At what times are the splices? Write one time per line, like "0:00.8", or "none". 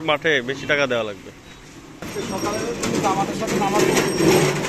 0:02.0